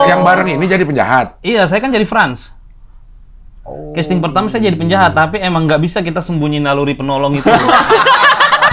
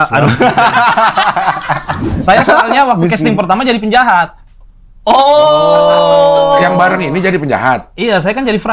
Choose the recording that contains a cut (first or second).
second